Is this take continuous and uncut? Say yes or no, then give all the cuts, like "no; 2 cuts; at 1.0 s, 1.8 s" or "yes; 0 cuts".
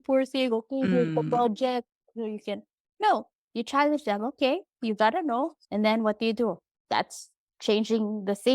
no; 2 cuts; at 3.4 s, 6.7 s